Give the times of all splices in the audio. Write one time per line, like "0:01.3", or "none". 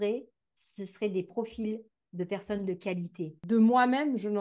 0:03.3

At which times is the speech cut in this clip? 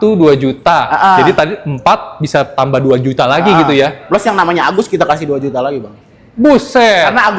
none

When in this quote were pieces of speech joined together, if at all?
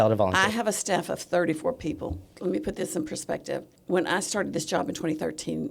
0:02.2
0:03.7

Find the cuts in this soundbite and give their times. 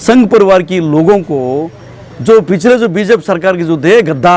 none

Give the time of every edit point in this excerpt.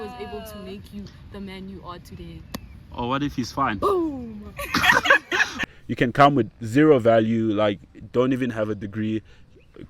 0:05.6

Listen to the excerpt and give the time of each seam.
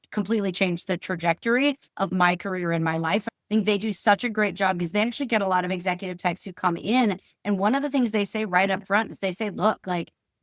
0:03.3

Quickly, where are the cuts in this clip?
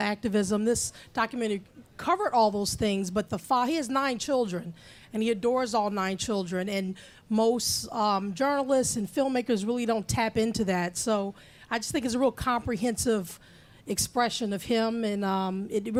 none

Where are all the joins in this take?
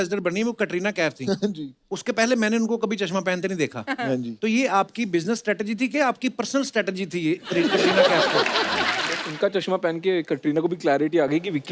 0:09.2

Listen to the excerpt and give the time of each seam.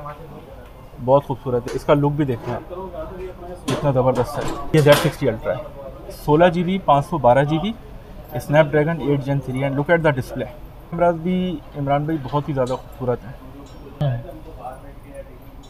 0:01.6
0:04.6
0:11.0
0:14.0

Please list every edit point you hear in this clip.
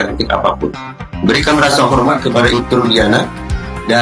none

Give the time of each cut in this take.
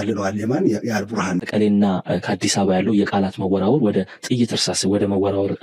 0:01.5

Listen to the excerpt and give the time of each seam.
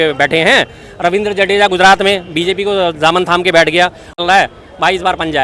0:04.2

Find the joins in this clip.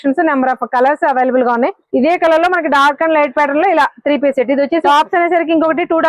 0:01.8
0:04.7

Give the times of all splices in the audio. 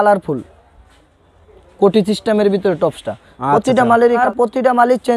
0:04.2

